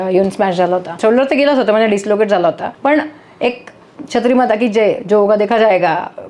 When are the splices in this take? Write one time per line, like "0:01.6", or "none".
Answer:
0:01.0
0:02.7

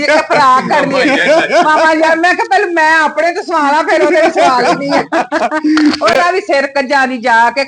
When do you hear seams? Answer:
none

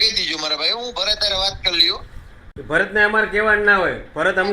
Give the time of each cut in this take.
0:02.5

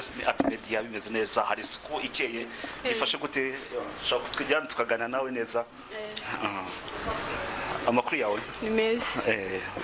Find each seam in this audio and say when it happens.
none

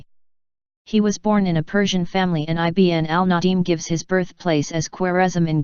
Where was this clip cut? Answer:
0:04.3

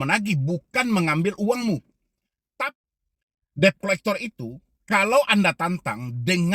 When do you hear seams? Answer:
0:02.8

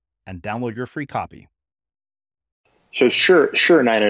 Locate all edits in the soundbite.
0:02.8

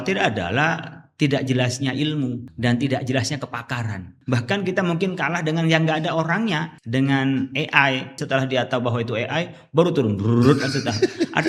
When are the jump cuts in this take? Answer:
0:02.5
0:04.1
0:06.7
0:08.2

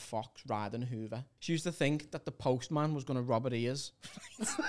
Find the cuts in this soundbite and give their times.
0:01.3

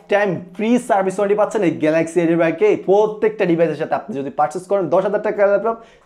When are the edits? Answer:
none

